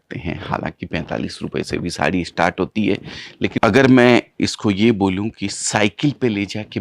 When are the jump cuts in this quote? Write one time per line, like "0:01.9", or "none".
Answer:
0:03.6

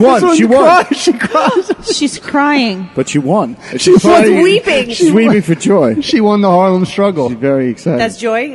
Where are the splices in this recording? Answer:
none

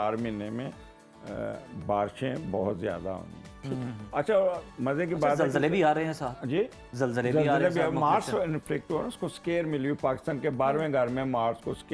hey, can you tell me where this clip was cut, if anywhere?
none

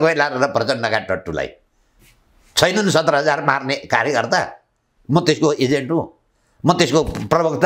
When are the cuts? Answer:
none

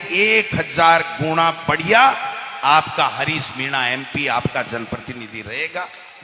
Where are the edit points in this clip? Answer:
none

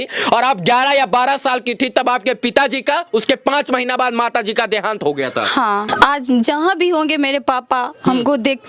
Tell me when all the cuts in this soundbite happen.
0:05.9

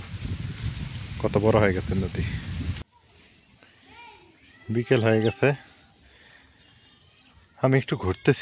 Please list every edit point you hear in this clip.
0:02.8

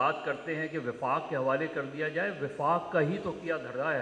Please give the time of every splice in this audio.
none

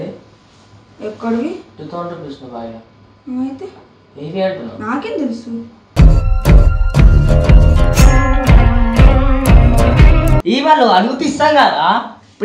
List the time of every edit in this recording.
0:10.4

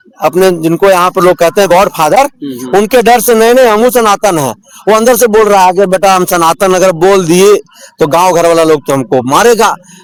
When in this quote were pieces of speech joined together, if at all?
none

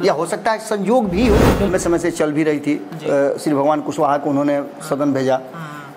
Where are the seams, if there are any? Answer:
0:01.7

